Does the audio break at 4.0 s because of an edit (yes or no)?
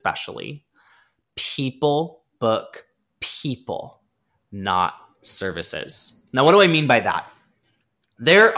no